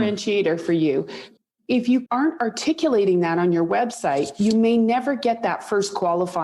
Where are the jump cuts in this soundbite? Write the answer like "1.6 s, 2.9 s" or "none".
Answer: 1.2 s, 2.1 s